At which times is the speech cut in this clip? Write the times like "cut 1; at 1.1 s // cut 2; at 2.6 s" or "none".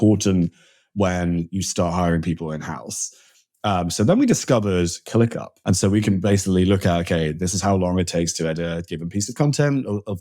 cut 1; at 5.5 s